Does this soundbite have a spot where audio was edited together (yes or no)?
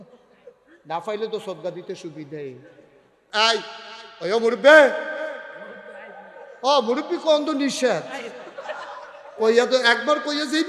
yes